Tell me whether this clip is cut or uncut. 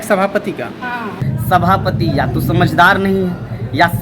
cut